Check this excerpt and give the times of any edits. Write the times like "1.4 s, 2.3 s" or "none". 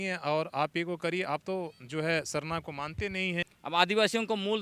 3.5 s